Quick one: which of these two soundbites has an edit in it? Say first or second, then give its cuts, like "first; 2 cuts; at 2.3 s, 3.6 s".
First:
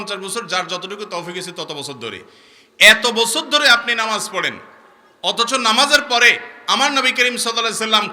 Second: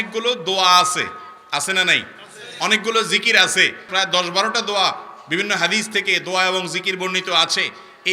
second; 1 cut; at 3.8 s